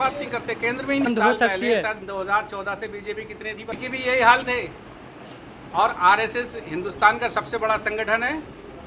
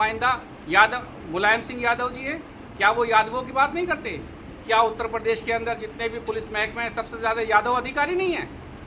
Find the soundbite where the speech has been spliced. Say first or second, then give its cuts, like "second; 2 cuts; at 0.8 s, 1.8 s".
first; 2 cuts; at 1.1 s, 3.9 s